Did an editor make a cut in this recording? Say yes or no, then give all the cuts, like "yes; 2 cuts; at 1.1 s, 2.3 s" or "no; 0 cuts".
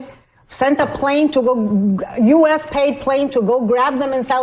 no; 0 cuts